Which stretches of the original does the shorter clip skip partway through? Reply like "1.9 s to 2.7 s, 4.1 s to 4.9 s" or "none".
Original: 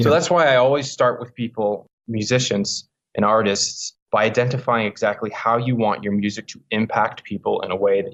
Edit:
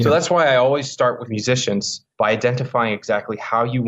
1.6 s to 3.5 s